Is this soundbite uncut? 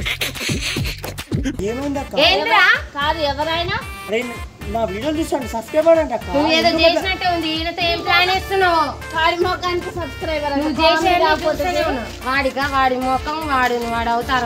no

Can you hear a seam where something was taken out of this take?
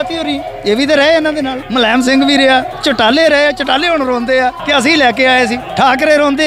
yes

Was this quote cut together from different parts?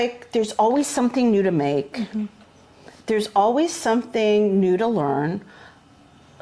no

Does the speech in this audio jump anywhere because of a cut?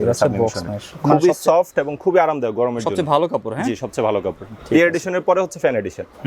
no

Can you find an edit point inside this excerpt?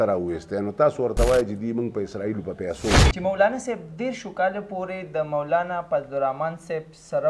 yes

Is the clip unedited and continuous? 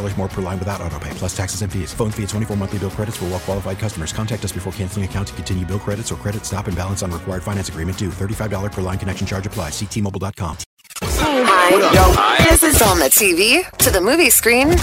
no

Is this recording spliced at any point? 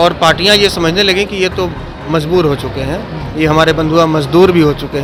no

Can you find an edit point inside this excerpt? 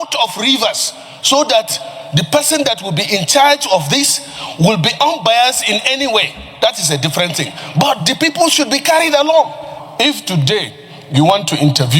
yes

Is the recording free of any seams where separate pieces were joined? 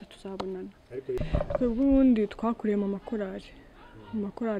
no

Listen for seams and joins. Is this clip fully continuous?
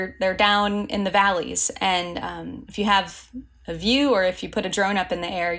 no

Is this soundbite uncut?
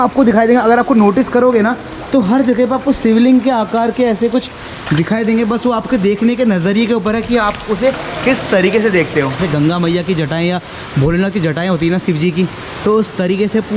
yes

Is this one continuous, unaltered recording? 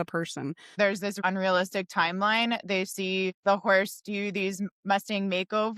no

